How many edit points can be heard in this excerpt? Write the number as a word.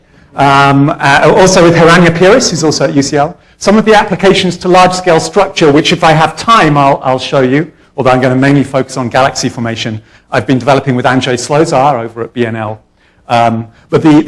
one